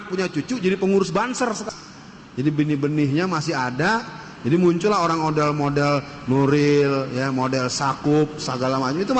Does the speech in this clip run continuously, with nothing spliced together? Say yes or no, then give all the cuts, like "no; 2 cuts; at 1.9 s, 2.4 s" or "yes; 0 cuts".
no; 1 cut; at 1.6 s